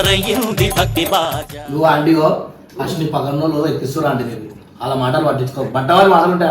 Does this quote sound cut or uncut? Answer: cut